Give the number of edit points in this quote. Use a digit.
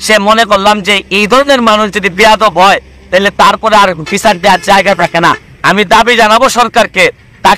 1